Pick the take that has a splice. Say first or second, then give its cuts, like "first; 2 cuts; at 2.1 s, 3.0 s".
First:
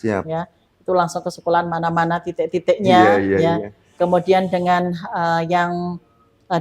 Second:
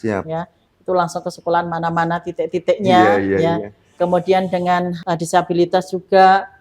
second; 1 cut; at 5.0 s